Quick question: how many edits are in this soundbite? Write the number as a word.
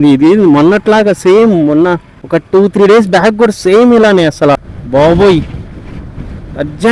two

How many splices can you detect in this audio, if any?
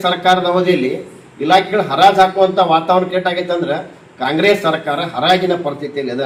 zero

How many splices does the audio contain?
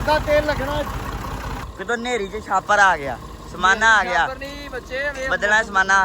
one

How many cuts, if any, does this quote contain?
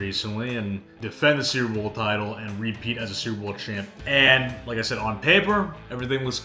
two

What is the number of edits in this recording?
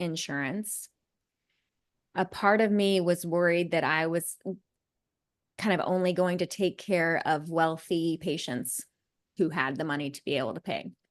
one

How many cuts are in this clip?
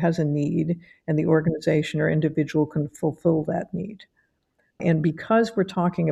one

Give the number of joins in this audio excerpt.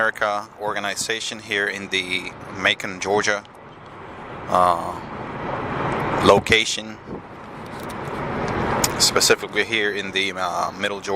one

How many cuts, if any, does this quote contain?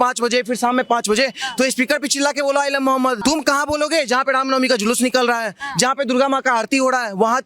one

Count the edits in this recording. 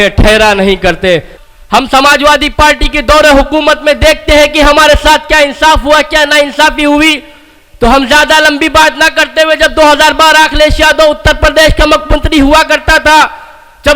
one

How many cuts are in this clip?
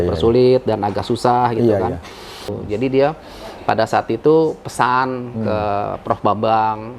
one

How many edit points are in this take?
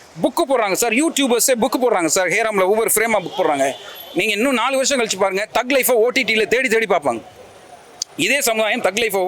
zero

